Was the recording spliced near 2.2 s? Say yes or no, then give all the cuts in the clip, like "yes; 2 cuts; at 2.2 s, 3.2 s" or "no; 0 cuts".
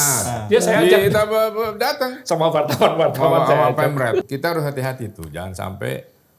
no; 1 cut; at 4.3 s